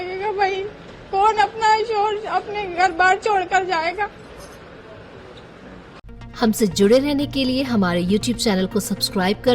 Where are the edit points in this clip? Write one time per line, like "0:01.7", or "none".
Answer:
none